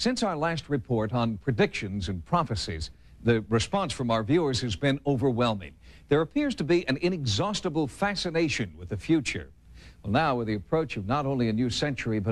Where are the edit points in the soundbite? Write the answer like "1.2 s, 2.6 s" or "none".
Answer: 11.0 s